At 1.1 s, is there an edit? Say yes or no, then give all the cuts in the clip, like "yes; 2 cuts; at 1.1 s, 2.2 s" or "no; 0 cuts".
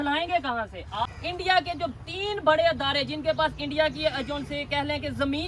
yes; 1 cut; at 1.1 s